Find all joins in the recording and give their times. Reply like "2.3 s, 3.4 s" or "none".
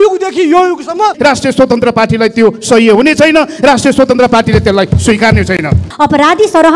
1.2 s, 5.9 s